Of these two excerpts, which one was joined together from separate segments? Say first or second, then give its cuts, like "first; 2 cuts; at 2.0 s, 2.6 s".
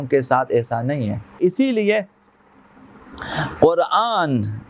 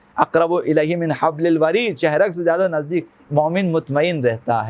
first; 1 cut; at 1.4 s